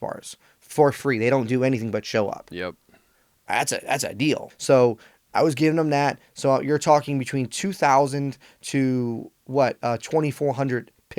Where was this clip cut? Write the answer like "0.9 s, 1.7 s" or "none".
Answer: 4.5 s

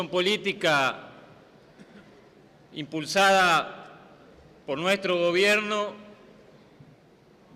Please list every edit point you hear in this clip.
3.7 s

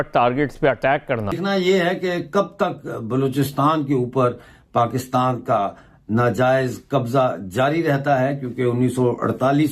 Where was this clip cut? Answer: 1.3 s

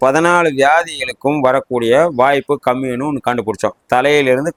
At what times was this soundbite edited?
none

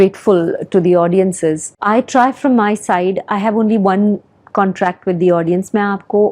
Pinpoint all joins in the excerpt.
1.8 s

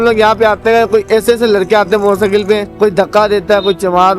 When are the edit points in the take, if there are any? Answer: 2.7 s

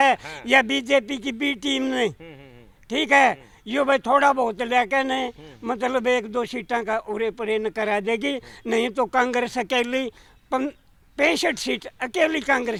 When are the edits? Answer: none

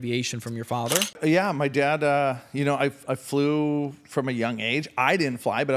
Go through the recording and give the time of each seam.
1.2 s

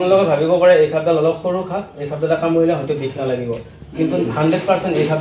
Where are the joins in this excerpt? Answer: none

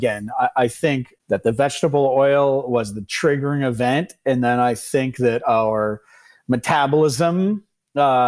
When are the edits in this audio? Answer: 1.1 s

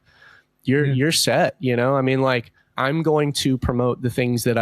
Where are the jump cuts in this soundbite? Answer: 2.7 s

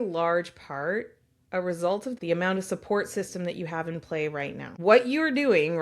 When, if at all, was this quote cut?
2.1 s, 4.7 s

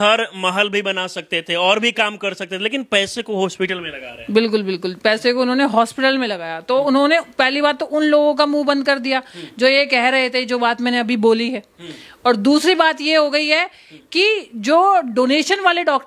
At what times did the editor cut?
none

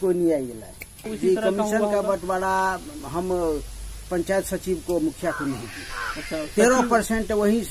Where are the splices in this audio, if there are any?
1.1 s

